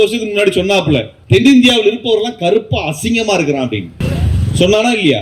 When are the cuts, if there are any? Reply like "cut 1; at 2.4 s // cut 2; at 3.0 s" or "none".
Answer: cut 1; at 1.1 s // cut 2; at 3.9 s